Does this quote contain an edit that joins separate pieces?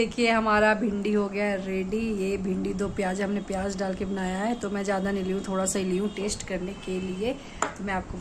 no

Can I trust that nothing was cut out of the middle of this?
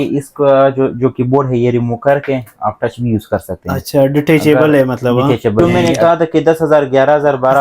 no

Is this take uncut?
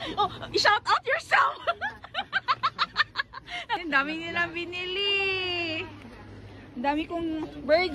no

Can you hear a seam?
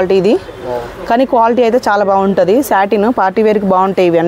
no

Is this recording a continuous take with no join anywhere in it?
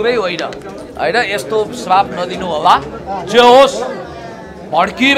yes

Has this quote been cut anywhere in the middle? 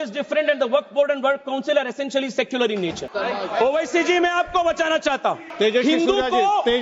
yes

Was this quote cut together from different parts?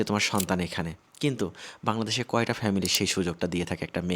no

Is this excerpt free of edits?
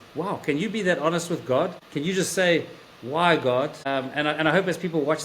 no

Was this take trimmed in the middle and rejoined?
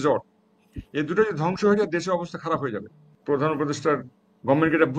yes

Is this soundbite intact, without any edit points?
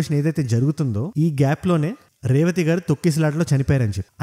yes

